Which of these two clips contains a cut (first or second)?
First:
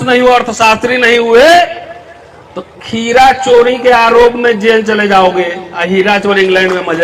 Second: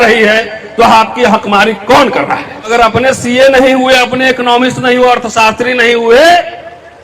second